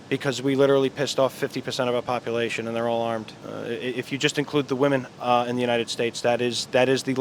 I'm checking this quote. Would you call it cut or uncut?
cut